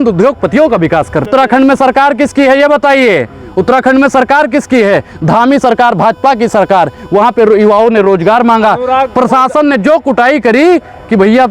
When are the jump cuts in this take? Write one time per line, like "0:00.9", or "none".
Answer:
0:01.3